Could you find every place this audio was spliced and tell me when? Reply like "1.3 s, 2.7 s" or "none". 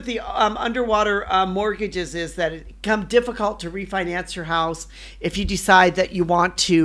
2.7 s